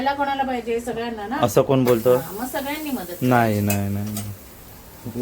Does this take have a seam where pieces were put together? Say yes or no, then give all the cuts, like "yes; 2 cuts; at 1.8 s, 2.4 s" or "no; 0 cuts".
no; 0 cuts